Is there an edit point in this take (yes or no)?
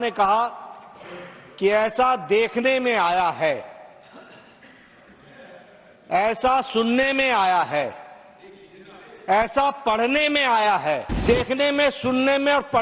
yes